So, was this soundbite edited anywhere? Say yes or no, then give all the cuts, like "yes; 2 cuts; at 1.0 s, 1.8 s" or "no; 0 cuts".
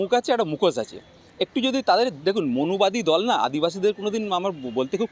no; 0 cuts